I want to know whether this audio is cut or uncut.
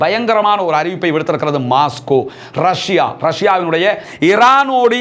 cut